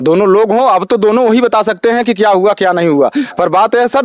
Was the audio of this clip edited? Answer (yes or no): no